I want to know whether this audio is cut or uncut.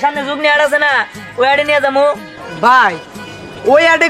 uncut